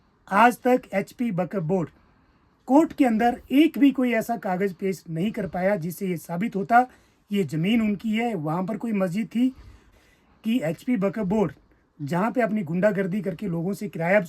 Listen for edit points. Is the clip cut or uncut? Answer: cut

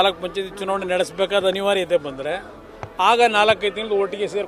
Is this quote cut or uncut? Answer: uncut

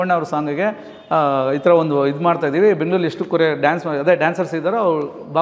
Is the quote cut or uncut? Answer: uncut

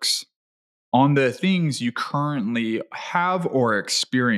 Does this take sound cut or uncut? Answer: uncut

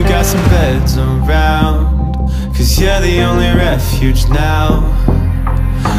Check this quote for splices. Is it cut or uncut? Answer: uncut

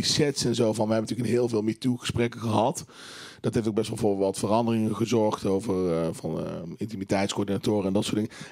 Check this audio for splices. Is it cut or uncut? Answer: uncut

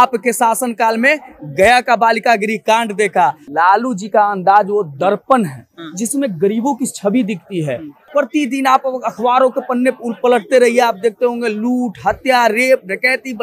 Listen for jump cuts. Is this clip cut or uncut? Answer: cut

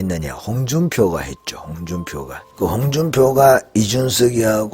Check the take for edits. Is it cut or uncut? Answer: cut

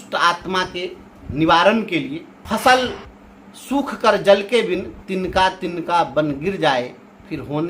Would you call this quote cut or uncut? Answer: cut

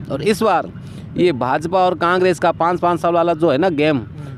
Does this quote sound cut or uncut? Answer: uncut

